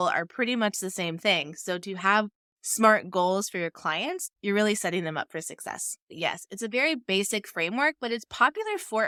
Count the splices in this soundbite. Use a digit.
0